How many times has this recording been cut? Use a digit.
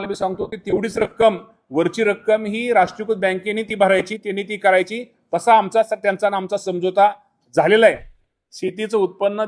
1